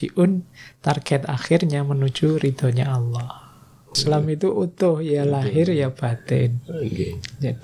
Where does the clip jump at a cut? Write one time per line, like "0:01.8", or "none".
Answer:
0:04.0